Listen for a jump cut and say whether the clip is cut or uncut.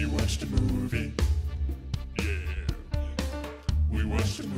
uncut